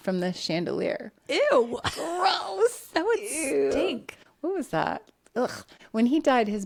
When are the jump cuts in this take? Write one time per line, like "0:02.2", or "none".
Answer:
none

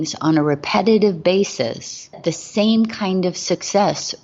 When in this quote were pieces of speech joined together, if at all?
0:02.2

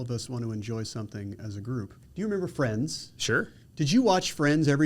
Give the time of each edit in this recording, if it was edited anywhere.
0:02.0

